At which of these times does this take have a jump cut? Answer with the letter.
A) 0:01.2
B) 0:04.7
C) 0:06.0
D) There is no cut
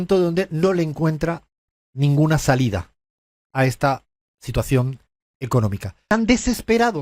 C